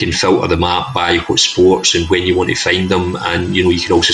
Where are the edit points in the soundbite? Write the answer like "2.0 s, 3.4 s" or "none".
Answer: none